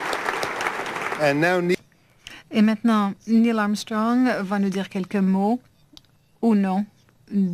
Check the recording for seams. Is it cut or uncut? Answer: uncut